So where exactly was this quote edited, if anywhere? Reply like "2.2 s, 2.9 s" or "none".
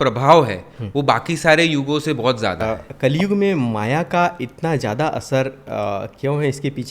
2.6 s